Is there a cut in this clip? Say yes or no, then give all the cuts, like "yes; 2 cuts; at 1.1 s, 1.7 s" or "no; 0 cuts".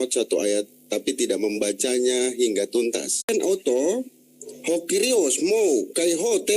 yes; 1 cut; at 3.3 s